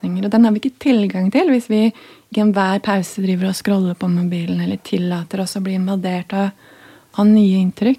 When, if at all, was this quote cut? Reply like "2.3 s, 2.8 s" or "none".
none